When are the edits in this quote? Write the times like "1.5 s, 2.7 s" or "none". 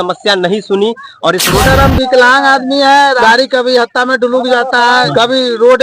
1.6 s, 3.2 s, 5.1 s